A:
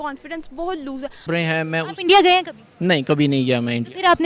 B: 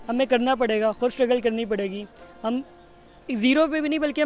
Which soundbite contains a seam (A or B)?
A